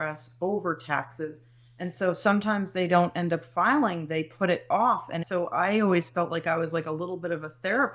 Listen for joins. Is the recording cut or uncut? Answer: cut